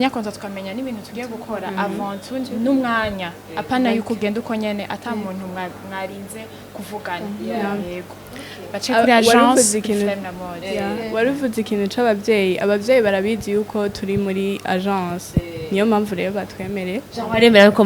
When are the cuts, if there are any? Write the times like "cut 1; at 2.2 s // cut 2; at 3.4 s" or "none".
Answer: none